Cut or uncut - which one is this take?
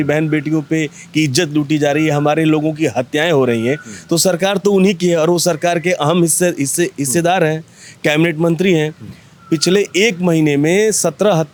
uncut